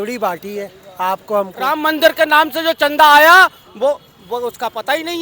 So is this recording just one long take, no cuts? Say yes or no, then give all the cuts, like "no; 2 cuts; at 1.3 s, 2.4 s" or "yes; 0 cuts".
no; 1 cut; at 1.6 s